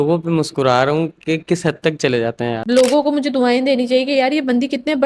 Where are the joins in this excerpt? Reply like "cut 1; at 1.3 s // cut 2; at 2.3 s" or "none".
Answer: cut 1; at 2.6 s